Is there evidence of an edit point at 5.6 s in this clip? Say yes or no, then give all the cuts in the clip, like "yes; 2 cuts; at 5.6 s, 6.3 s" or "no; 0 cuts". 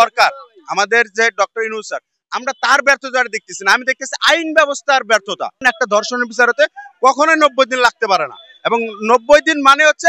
yes; 1 cut; at 5.6 s